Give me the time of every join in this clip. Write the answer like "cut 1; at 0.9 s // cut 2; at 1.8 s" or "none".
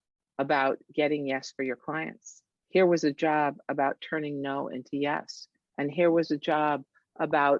none